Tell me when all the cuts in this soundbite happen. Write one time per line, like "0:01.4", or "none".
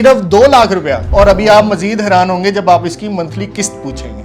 0:01.0